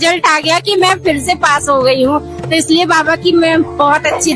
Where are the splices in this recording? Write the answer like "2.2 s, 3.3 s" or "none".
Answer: none